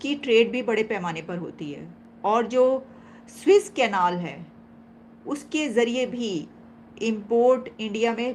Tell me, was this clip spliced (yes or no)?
no